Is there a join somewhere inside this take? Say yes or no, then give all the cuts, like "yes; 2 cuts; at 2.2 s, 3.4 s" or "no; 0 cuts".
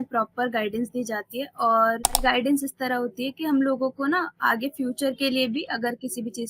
yes; 1 cut; at 2.2 s